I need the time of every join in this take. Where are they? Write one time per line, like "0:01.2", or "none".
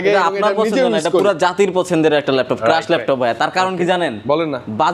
none

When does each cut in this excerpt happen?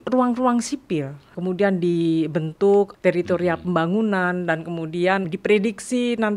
0:01.3
0:02.9
0:05.3

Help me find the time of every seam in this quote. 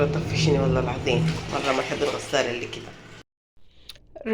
0:03.2

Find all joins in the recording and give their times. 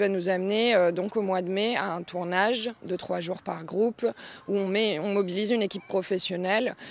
0:03.6

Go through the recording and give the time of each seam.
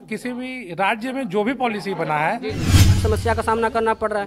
0:02.9

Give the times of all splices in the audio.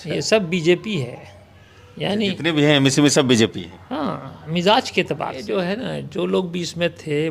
0:05.4

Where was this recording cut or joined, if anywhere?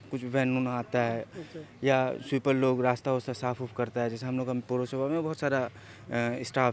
none

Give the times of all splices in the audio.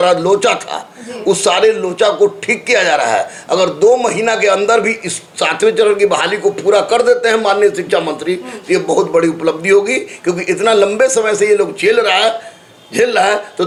none

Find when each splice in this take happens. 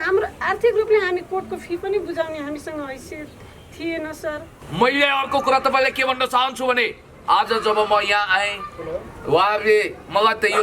0:04.6

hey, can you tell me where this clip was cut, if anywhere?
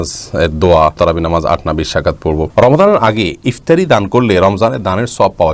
0:01.0
0:02.5

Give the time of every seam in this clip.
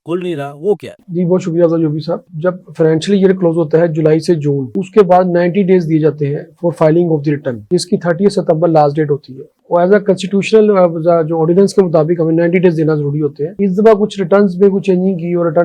none

